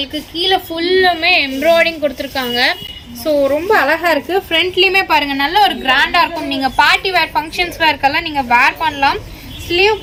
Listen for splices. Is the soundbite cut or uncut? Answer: uncut